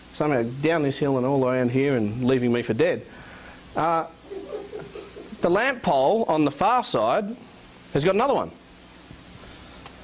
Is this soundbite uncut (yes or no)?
no